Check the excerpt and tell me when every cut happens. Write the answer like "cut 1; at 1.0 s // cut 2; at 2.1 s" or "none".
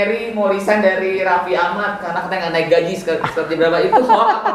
none